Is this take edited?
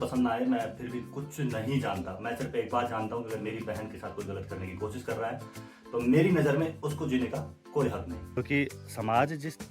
yes; 1 cut; at 8.4 s

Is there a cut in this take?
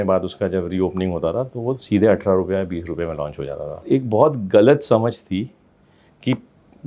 yes; 1 cut; at 3.8 s

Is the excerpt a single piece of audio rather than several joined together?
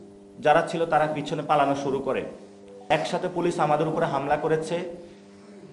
no; 1 cut; at 2.8 s

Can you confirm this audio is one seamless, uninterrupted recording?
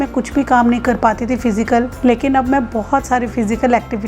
no; 1 cut; at 1.9 s

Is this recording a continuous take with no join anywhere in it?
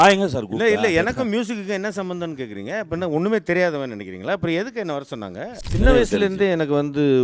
no; 1 cut; at 5.6 s

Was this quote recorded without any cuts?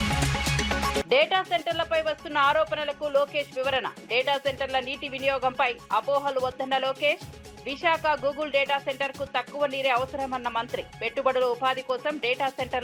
no; 1 cut; at 0.9 s

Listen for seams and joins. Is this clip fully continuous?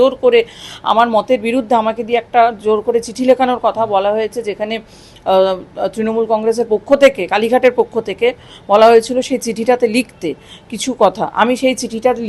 yes; 0 cuts

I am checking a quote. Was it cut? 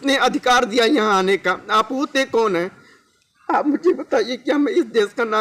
no; 0 cuts

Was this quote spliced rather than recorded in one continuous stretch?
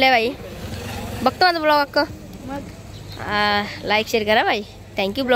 no; 0 cuts

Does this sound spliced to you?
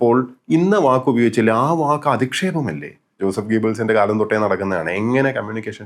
yes; 1 cut; at 3.2 s

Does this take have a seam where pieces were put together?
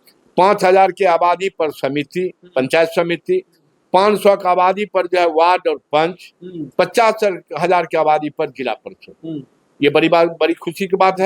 no; 0 cuts

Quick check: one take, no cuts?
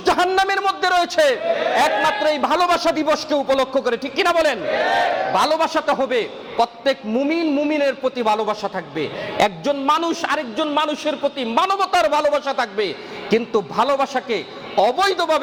yes; 0 cuts

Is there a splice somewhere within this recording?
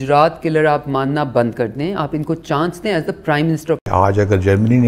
yes; 1 cut; at 3.9 s

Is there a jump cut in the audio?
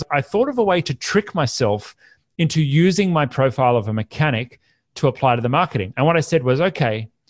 no; 0 cuts

